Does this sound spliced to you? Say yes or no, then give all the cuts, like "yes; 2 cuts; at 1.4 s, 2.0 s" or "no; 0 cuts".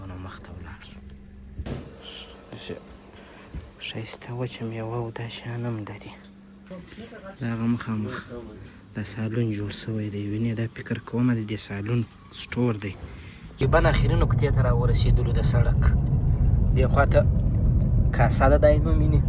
yes; 3 cuts; at 1.6 s, 6.7 s, 13.6 s